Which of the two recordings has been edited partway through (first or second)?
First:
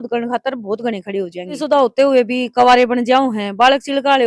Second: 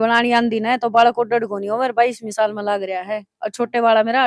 first